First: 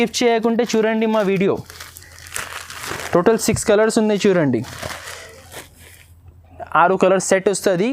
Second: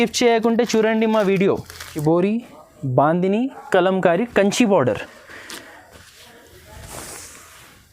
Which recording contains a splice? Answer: second; 1 cut; at 1.9 s

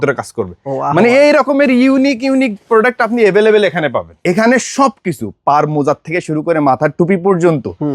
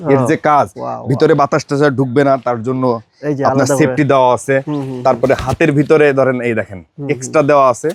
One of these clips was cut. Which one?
first; 1 cut; at 4.1 s

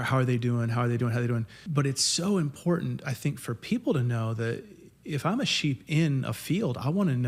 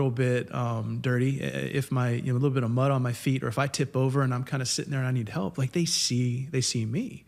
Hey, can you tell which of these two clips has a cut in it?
first; 1 cut; at 1.6 s

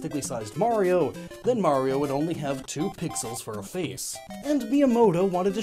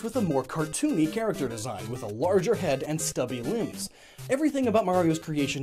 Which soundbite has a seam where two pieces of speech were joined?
second; 1 cut; at 4.5 s

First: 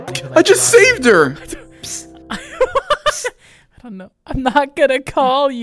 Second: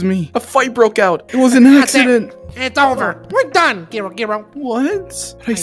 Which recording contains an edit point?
second; 1 cut; at 1.2 s

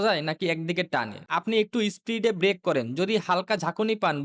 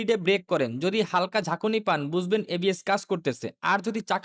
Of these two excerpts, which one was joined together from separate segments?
first; 1 cut; at 1.2 s

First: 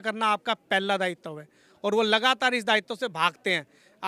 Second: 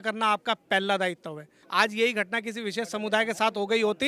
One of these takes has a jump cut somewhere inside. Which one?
second; 1 cut; at 1.6 s

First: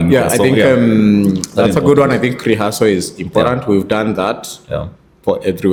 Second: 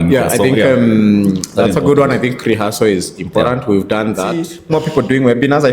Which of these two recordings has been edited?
second; 1 cut; at 4.5 s

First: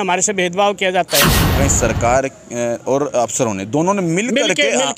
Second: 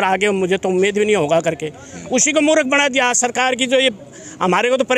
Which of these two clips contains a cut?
first; 1 cut; at 1.5 s

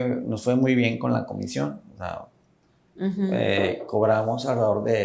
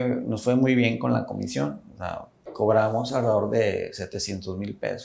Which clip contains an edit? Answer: second; 1 cut; at 2.5 s

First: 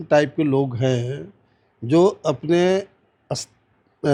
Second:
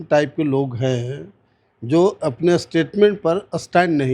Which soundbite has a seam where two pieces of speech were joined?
second; 1 cut; at 2.2 s

